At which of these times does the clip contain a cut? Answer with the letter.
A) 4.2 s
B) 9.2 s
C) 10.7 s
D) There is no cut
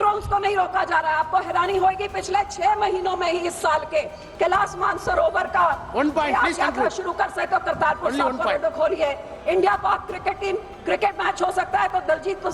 A